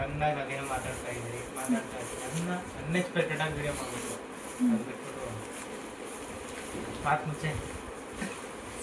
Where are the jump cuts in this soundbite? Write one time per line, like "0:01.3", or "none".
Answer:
none